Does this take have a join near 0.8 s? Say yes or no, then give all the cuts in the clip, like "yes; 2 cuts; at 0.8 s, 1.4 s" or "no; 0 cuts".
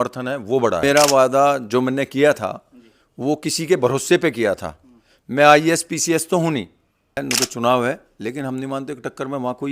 yes; 2 cuts; at 0.8 s, 7.2 s